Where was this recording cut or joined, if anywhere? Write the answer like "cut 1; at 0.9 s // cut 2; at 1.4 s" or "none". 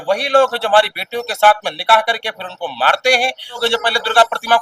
cut 1; at 3.6 s